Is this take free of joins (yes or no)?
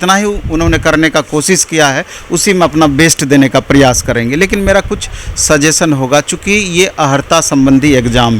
yes